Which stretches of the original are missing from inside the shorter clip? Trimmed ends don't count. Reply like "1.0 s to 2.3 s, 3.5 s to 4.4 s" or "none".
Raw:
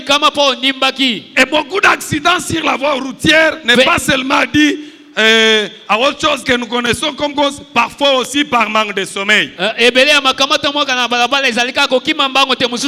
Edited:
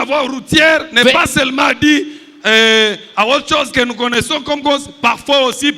none